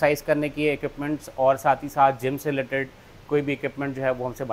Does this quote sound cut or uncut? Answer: uncut